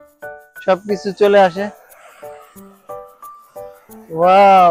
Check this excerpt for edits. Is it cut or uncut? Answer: uncut